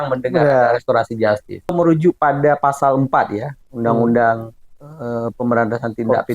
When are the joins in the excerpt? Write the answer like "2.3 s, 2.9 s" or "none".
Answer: 1.7 s

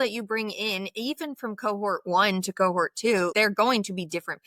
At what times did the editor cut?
3.3 s

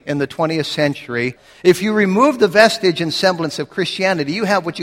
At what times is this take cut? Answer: 1.4 s

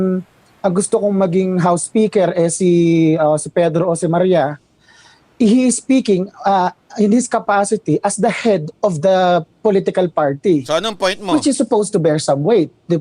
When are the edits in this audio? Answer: 1.3 s

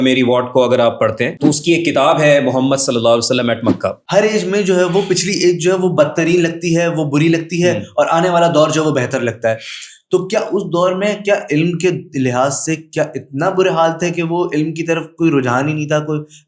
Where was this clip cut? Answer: 4.0 s

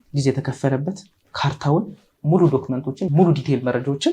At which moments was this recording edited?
3.1 s

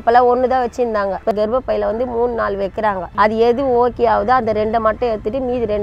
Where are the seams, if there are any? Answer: 1.3 s, 3.1 s

